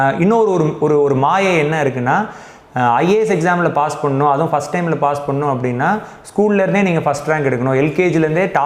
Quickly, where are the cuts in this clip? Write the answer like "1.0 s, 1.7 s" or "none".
none